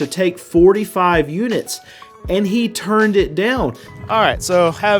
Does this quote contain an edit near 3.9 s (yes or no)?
yes